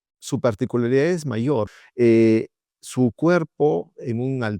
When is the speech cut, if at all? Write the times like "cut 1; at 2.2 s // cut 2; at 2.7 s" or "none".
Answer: cut 1; at 1.8 s